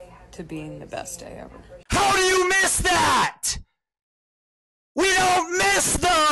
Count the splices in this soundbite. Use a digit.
1